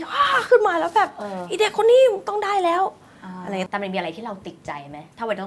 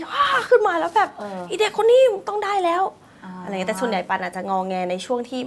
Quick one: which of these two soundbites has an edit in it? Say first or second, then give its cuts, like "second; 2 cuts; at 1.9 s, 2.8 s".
first; 1 cut; at 3.7 s